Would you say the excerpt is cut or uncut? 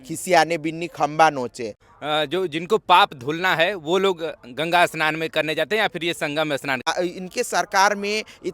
cut